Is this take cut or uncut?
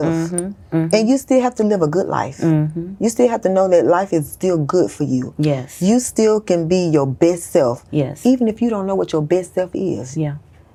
uncut